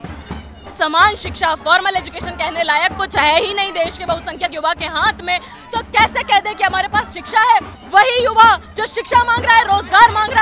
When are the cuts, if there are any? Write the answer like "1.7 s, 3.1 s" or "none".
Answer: 7.8 s